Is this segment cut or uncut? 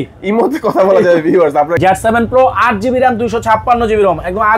cut